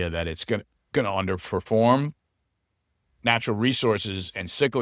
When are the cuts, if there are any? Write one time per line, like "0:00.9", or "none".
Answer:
none